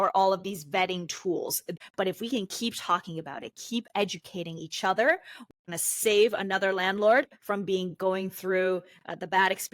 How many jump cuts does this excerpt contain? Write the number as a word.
two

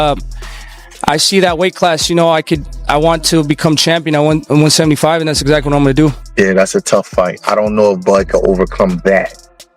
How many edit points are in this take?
one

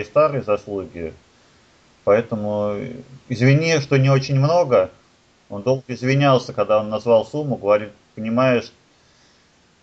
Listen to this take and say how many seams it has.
zero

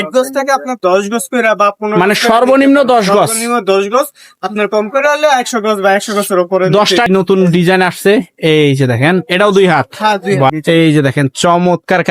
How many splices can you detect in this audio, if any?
two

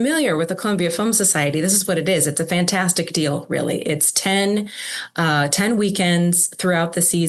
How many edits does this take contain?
zero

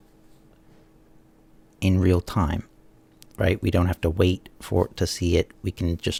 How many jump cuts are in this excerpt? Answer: zero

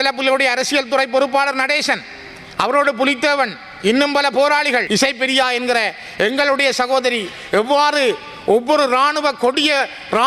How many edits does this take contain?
one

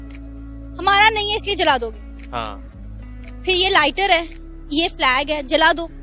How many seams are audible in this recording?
one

